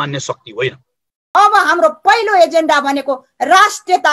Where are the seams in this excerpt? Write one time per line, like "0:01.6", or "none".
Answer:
0:01.4